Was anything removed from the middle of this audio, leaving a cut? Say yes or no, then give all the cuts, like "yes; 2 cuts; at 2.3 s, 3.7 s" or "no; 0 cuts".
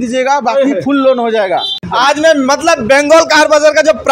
yes; 1 cut; at 1.8 s